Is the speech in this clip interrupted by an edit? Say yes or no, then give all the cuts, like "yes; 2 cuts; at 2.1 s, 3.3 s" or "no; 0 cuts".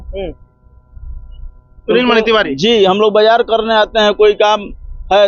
no; 0 cuts